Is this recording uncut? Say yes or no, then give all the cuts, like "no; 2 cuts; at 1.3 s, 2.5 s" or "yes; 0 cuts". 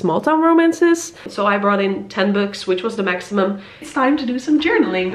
no; 2 cuts; at 1.2 s, 3.9 s